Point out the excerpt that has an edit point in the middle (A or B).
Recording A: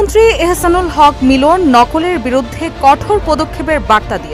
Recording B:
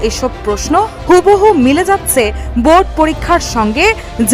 B